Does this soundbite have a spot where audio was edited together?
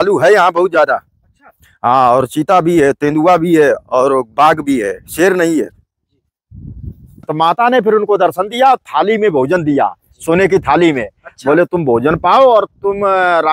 yes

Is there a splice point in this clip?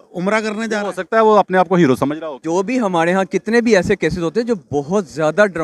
yes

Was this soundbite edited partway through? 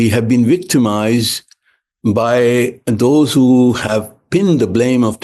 no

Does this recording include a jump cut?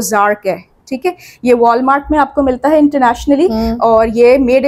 no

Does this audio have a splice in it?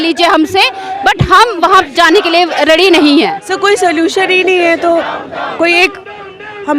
yes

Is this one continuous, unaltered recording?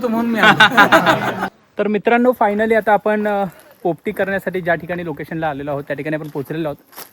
no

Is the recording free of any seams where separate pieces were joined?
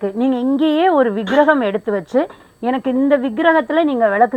yes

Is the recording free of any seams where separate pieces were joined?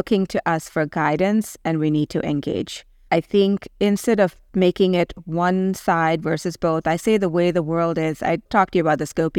yes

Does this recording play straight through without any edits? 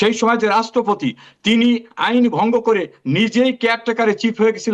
yes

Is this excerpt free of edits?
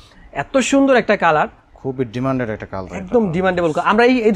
yes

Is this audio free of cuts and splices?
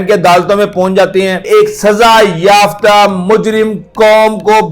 no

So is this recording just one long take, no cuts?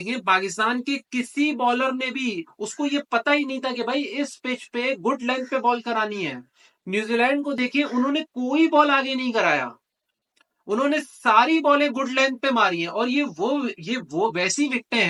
yes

